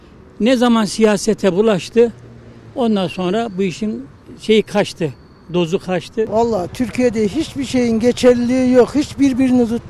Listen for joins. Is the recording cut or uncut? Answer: cut